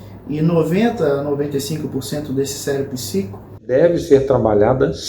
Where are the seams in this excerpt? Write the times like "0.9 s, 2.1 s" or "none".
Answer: 3.7 s